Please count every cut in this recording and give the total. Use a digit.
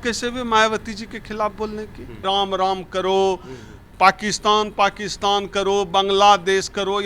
1